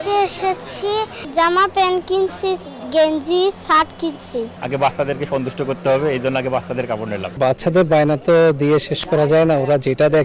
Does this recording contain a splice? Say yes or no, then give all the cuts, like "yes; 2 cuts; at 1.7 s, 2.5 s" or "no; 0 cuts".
yes; 3 cuts; at 1.2 s, 4.6 s, 7.2 s